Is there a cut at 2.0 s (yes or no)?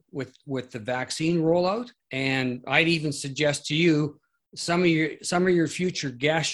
yes